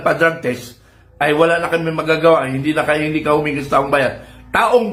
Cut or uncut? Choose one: uncut